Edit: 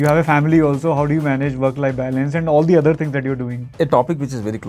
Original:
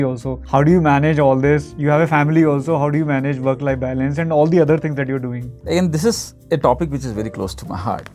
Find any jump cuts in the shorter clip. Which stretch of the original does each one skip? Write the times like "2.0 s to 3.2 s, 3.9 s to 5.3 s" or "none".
5.4 s to 6.3 s